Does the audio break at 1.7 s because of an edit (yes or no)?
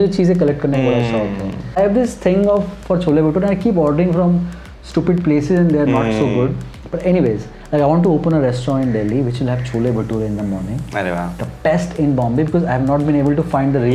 yes